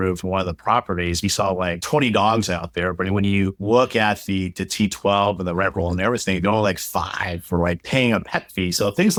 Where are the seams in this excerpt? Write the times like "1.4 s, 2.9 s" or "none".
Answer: none